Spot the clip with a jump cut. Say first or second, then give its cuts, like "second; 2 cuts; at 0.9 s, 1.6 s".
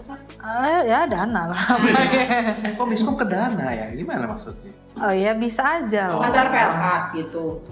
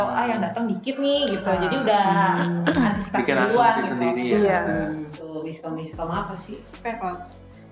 second; 1 cut; at 5.2 s